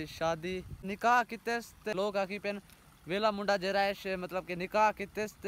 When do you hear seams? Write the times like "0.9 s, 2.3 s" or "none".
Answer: 0.9 s, 1.9 s